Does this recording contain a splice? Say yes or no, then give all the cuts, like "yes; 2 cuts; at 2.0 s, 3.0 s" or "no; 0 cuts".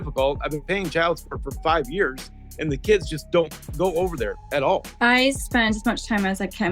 yes; 1 cut; at 4.9 s